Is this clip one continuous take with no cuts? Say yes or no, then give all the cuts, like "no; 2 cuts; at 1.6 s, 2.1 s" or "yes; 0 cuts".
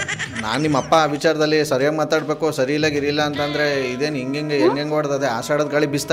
yes; 0 cuts